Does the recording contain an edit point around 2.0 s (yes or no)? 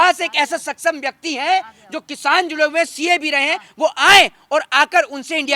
no